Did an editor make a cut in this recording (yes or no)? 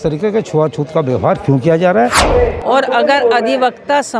yes